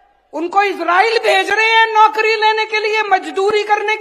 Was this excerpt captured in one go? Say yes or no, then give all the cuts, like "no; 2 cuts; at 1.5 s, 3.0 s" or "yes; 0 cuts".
yes; 0 cuts